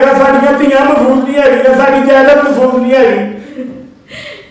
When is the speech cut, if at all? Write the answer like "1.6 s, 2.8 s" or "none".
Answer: 3.5 s